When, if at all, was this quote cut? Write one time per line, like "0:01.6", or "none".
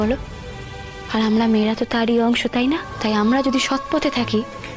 0:02.9